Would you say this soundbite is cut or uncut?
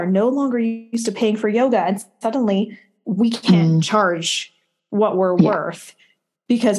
uncut